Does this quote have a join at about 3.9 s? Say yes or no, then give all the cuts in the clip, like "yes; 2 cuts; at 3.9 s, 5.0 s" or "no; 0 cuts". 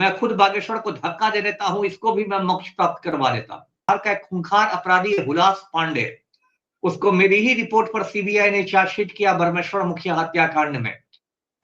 yes; 1 cut; at 3.9 s